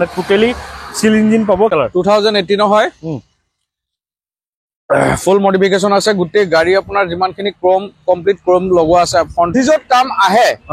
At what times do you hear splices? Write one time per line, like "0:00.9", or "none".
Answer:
0:01.7
0:09.5